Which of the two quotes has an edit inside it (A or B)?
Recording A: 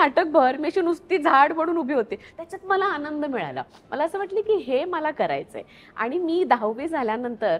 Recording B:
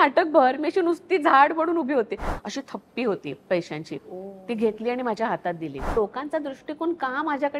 B